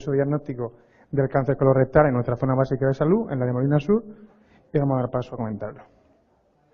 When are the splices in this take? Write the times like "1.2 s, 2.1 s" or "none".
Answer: 5.6 s